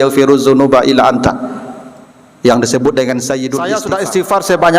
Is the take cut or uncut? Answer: cut